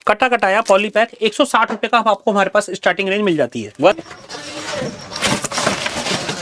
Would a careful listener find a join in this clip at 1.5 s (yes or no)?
no